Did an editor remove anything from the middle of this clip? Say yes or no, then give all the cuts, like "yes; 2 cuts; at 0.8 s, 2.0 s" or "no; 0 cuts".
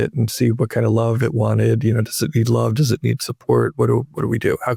no; 0 cuts